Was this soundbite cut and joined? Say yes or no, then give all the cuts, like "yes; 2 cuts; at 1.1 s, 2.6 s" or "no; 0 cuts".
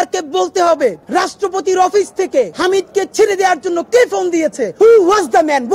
yes; 3 cuts; at 1.0 s, 2.5 s, 4.6 s